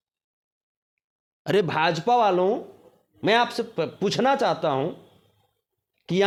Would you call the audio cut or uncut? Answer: uncut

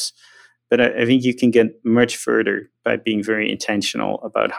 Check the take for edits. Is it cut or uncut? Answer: uncut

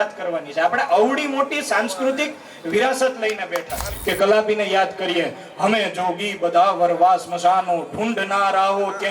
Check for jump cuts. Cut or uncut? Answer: cut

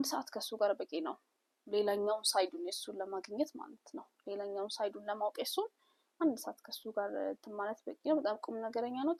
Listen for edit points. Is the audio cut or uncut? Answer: uncut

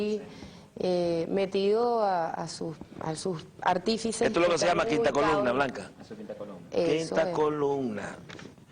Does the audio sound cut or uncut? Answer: uncut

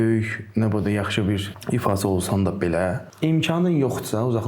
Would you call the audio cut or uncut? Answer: cut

